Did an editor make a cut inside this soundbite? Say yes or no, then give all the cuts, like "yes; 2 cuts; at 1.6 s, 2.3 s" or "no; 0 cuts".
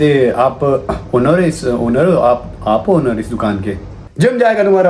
yes; 1 cut; at 4.0 s